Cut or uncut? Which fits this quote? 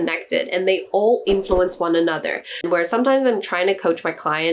cut